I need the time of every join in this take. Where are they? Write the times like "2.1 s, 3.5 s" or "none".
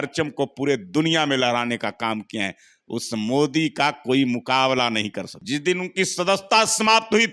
5.3 s